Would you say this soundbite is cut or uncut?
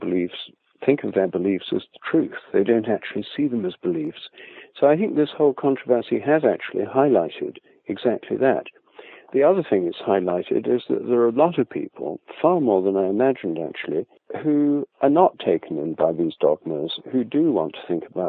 uncut